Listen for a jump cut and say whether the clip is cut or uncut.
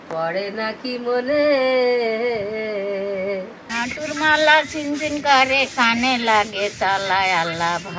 cut